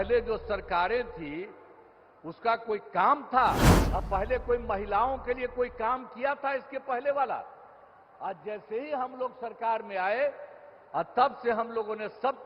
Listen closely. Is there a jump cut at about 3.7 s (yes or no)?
yes